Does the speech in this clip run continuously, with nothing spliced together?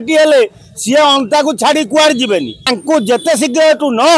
no; 1 cut; at 2.7 s

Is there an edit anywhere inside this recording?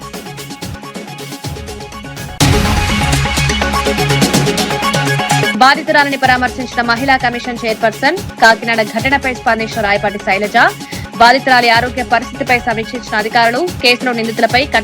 yes; 1 cut; at 2.1 s

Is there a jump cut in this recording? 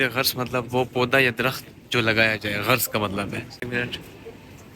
yes; 1 cut; at 3.6 s

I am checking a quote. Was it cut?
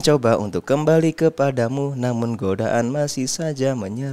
no; 0 cuts

